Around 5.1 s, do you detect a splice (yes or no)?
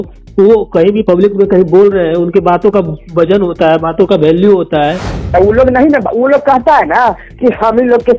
yes